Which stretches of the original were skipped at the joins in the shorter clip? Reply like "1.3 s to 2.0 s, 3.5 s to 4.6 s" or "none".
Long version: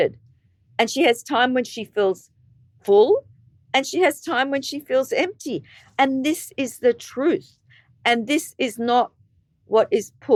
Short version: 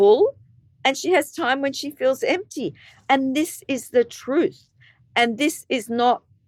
none